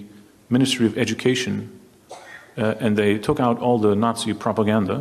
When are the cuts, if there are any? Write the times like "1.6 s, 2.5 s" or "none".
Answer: none